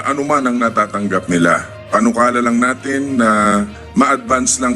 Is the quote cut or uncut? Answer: uncut